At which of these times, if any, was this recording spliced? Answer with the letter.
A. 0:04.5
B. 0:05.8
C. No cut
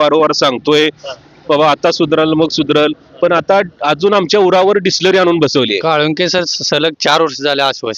B